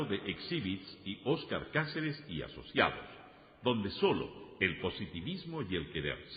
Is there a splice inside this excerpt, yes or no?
no